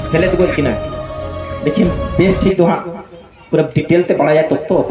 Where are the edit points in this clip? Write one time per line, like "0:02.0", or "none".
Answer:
none